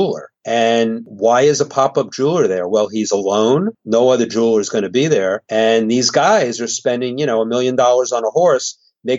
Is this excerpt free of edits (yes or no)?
yes